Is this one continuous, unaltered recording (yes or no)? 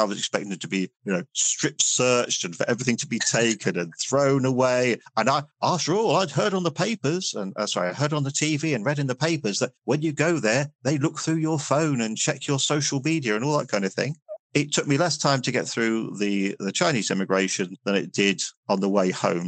yes